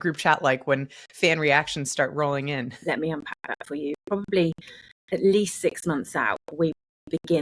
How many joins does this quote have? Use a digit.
1